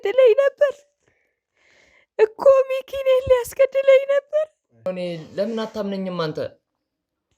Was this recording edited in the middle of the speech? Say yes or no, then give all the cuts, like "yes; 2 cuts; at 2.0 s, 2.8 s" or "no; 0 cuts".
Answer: yes; 1 cut; at 4.9 s